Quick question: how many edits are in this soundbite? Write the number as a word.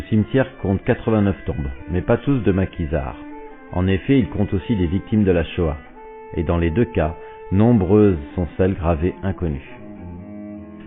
one